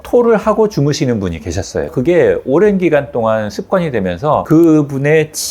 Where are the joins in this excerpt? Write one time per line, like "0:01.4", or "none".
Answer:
0:01.9